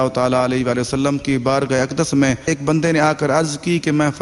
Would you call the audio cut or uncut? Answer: uncut